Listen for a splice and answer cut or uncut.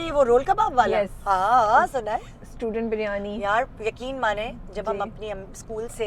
uncut